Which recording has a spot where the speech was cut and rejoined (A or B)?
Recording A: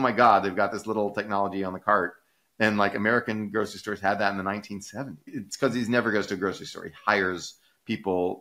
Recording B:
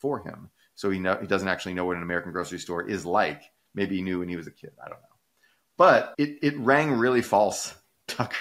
A